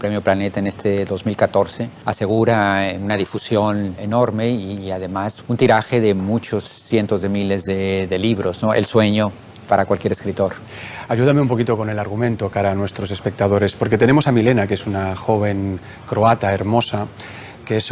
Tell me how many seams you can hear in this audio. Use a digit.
0